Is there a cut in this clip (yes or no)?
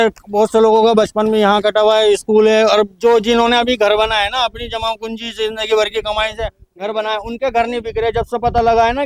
no